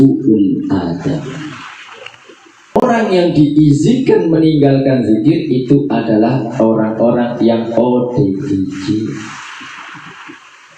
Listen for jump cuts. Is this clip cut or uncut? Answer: cut